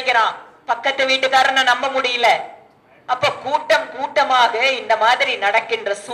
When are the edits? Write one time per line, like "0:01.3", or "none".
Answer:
none